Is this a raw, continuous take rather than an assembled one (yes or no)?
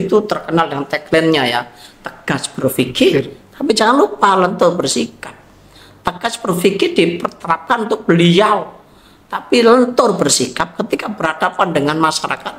yes